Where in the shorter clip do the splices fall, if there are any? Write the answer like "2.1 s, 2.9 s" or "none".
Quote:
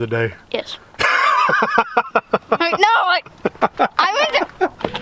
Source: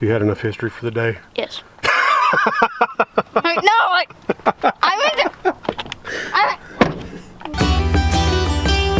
none